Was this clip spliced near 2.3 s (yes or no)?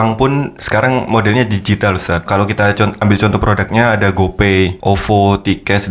yes